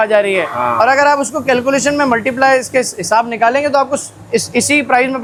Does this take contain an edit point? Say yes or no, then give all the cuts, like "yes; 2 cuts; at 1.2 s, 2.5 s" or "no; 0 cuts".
no; 0 cuts